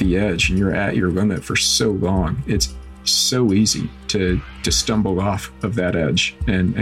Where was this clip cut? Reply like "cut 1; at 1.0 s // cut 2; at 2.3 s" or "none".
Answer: none